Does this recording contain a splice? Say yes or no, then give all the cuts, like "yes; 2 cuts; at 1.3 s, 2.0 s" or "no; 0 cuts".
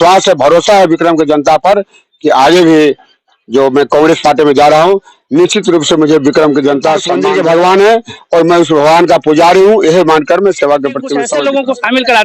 yes; 2 cuts; at 7.1 s, 11.2 s